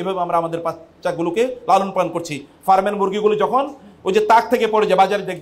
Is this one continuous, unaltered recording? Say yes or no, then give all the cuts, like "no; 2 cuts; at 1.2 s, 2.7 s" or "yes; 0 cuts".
yes; 0 cuts